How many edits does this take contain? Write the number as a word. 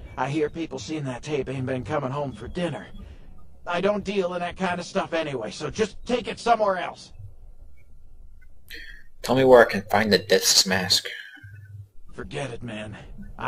zero